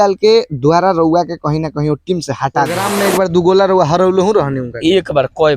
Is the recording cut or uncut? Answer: cut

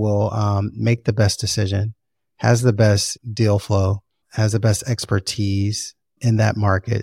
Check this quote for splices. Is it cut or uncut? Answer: uncut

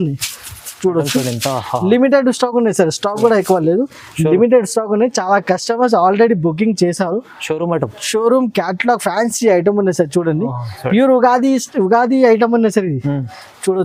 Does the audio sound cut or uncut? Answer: uncut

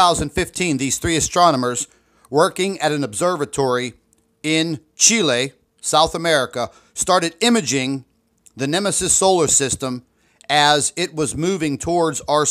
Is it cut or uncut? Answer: cut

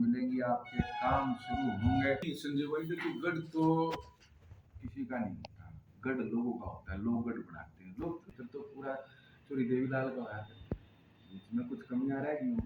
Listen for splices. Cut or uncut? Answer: cut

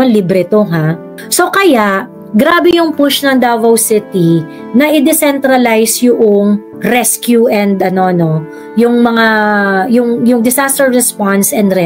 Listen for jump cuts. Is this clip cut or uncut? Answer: uncut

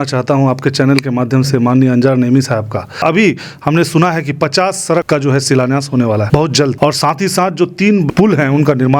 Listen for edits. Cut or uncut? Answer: cut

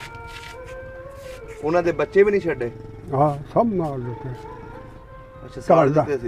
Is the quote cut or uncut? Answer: cut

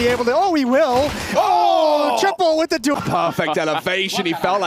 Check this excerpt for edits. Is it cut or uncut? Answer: cut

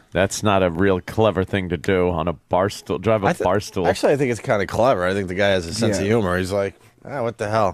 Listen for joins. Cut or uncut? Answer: cut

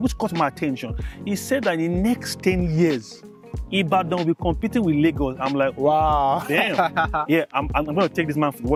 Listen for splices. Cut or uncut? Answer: uncut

